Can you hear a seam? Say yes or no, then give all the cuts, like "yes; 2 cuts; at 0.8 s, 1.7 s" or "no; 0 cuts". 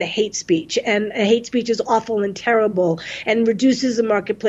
no; 0 cuts